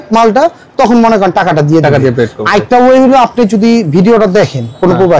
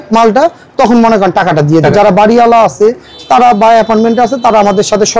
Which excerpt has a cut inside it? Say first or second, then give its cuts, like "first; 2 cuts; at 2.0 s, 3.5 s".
second; 1 cut; at 1.9 s